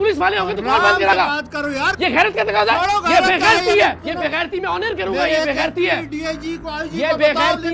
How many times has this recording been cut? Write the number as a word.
one